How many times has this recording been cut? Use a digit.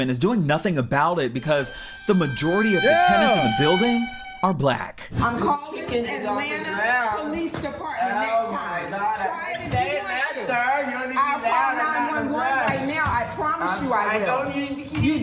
0